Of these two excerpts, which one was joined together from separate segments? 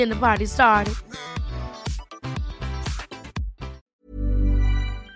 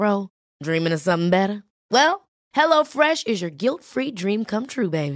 first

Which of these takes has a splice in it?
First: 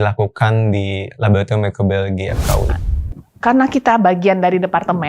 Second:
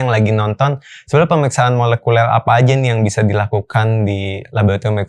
first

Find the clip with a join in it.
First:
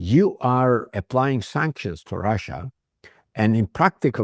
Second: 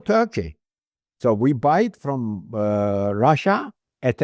first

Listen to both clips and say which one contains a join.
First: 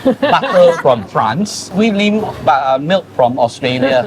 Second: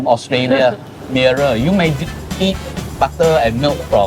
first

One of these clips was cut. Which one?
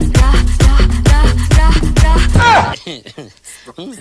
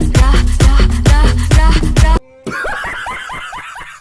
second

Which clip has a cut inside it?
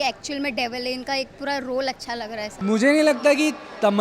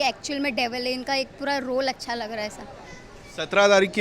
first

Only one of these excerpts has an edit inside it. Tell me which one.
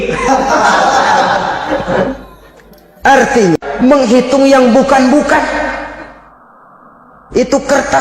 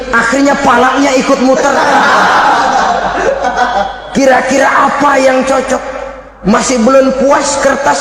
first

